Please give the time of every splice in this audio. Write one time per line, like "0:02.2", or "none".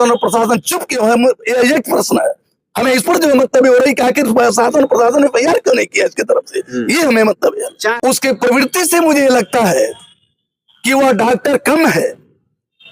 0:07.9